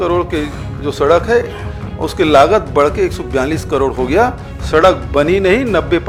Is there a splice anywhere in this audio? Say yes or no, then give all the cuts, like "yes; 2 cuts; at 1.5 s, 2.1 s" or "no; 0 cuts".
no; 0 cuts